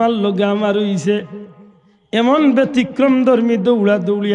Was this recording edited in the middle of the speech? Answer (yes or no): no